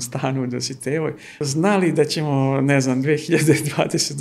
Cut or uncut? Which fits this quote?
cut